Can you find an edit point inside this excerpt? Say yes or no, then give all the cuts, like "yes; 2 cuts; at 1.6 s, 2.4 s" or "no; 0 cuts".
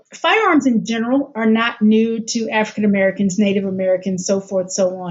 no; 0 cuts